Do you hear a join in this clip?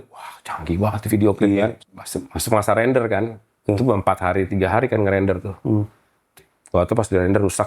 yes; 1 cut; at 1.8 s

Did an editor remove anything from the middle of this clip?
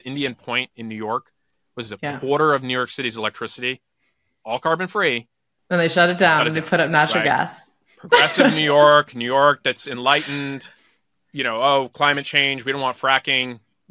no; 0 cuts

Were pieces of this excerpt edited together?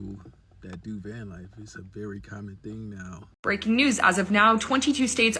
yes; 1 cut; at 3.4 s

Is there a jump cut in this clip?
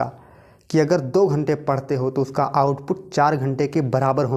no; 0 cuts

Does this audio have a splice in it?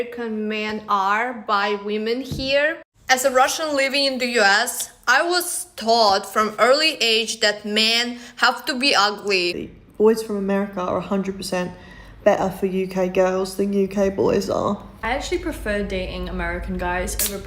yes; 3 cuts; at 2.9 s, 9.6 s, 14.9 s

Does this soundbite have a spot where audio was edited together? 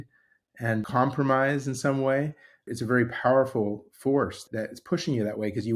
yes; 3 cuts; at 0.9 s, 2.6 s, 4.4 s

